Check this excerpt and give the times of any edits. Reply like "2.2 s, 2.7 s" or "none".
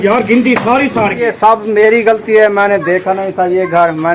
1.2 s